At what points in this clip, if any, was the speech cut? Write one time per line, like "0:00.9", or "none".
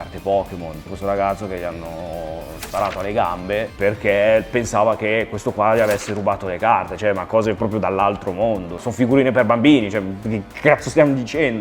0:00.9
0:03.7
0:08.9